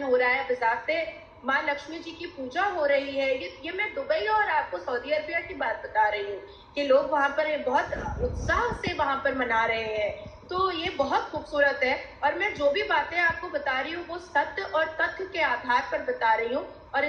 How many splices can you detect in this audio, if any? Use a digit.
0